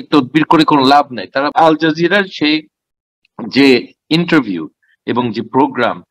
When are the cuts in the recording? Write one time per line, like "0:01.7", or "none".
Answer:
0:01.5